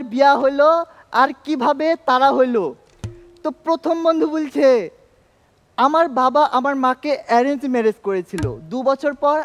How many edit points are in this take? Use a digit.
0